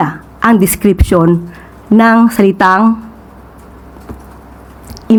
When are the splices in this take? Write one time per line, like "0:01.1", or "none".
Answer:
none